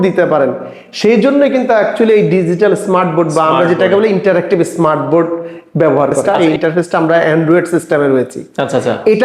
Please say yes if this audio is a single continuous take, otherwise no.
no